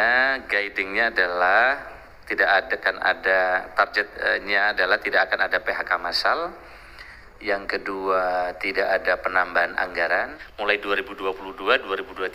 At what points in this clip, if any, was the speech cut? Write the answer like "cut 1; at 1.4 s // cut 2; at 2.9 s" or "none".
cut 1; at 10.4 s

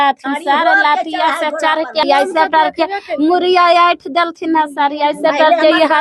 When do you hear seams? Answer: cut 1; at 2.0 s

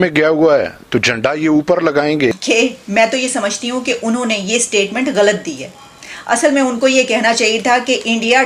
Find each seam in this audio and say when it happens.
cut 1; at 2.4 s

